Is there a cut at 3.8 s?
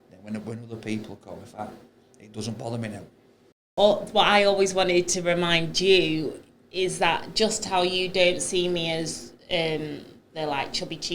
yes; 1 cut; at 3.8 s

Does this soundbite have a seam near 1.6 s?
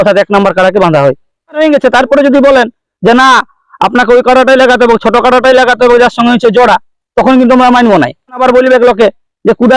yes; 2 cuts; at 1.6 s, 8.4 s

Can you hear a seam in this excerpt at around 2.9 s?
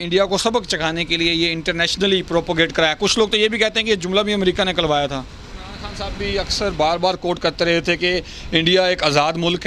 no; 1 cut; at 6.0 s

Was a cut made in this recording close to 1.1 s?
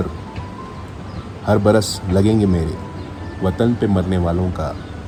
no; 0 cuts

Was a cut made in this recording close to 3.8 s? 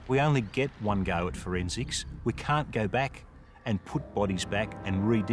no; 0 cuts

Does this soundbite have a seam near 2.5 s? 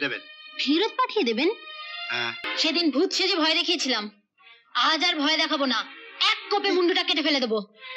yes; 1 cut; at 2.5 s

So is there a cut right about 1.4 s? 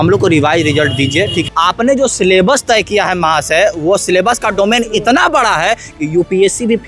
yes; 1 cut; at 1.4 s

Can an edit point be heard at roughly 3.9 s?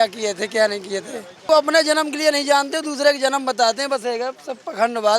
no; 1 cut; at 1.5 s

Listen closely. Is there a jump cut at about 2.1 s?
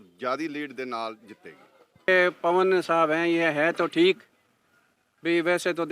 yes; 1 cut; at 2.1 s

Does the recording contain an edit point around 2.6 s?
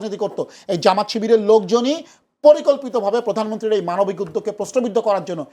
no; 0 cuts

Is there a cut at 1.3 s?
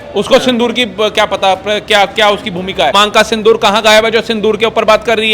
no; 1 cut; at 2.9 s

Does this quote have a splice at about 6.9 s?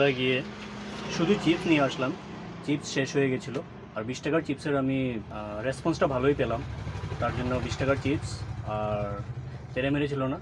no; 1 cut; at 5.3 s

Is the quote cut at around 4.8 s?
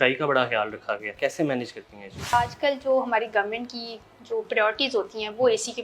no; 2 cuts; at 1.1 s, 2.3 s

